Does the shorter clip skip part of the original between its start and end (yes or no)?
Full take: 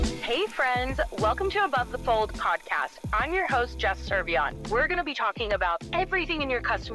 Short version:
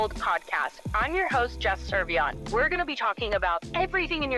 no